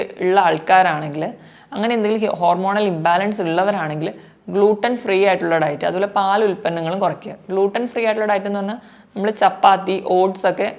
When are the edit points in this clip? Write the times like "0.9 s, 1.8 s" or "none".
none

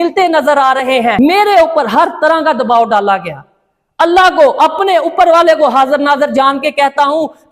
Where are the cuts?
1.2 s

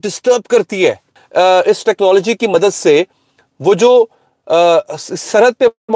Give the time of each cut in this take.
1.1 s

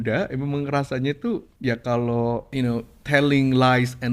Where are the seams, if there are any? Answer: 1.5 s, 2.5 s

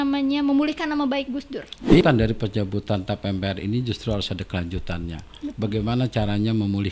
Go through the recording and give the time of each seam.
2.0 s

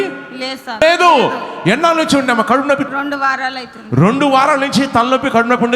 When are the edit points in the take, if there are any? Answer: 0.8 s, 2.9 s

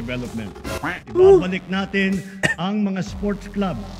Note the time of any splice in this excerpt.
1.0 s

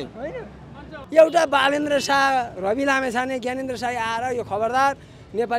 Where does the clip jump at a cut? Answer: 1.0 s

